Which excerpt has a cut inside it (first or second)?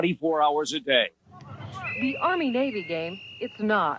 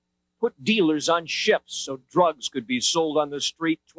first